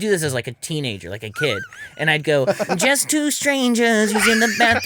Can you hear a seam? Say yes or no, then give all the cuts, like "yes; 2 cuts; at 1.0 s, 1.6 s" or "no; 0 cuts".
no; 0 cuts